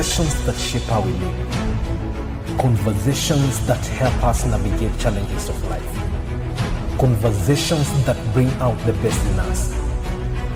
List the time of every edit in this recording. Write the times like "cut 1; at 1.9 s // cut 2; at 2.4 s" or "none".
none